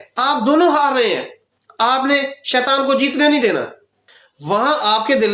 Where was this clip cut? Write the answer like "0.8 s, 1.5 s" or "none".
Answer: none